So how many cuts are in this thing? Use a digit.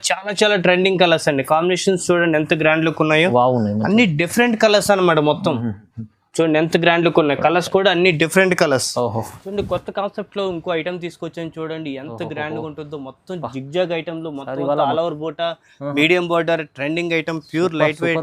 1